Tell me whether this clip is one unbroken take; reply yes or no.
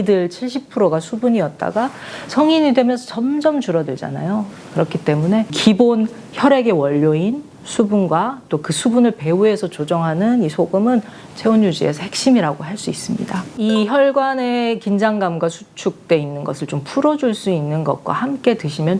no